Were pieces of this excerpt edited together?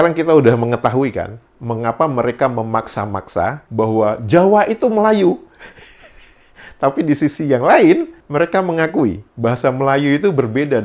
no; 0 cuts

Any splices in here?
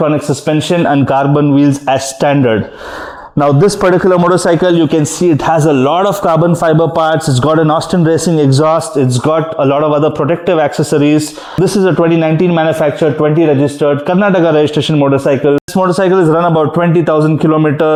no; 0 cuts

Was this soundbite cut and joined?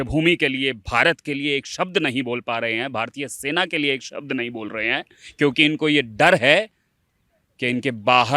no; 0 cuts

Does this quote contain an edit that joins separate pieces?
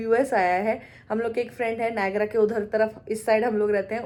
no; 0 cuts

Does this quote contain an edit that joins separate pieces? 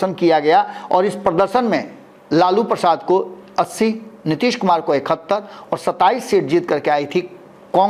no; 0 cuts

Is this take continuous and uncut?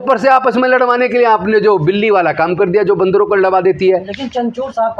yes; 0 cuts

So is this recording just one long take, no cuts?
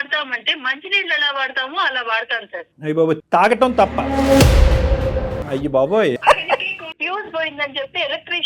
no; 2 cuts; at 5.4 s, 6.8 s

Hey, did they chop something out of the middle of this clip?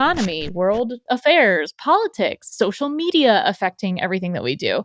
yes; 1 cut; at 1.0 s

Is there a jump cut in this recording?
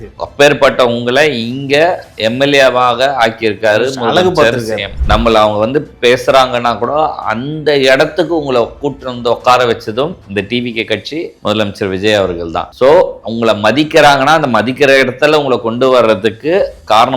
yes; 1 cut; at 5.0 s

